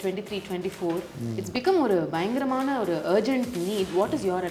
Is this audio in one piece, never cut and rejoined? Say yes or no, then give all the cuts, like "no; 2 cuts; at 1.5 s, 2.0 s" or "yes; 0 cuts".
yes; 0 cuts